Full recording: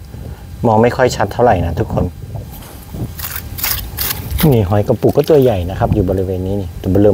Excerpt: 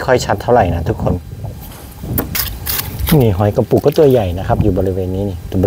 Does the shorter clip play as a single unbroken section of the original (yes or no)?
no